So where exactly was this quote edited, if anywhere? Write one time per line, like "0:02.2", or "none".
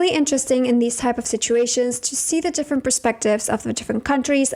none